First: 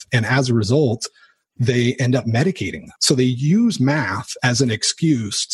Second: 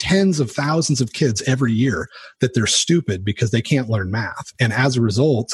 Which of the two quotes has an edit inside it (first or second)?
first